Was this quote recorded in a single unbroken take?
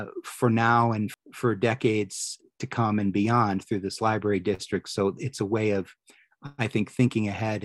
no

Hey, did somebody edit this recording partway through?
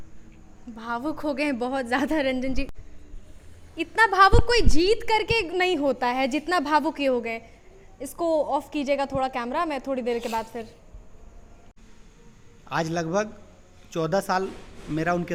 no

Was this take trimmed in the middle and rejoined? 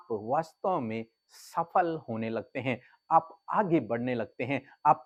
no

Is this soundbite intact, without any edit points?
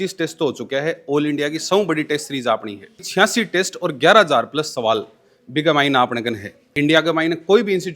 no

